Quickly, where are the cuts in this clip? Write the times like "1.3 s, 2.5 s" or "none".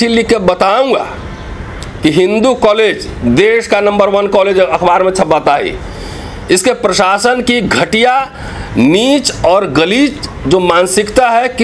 none